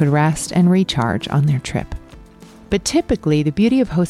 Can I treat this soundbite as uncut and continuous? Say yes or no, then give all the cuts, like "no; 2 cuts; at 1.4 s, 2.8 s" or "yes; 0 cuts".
yes; 0 cuts